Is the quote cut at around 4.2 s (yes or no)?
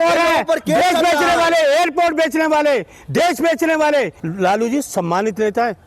yes